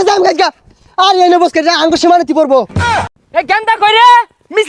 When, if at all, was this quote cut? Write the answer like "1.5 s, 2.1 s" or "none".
3.1 s